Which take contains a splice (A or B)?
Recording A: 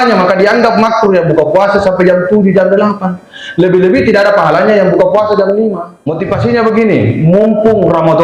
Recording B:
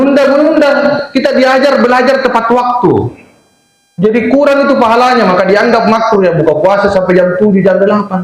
A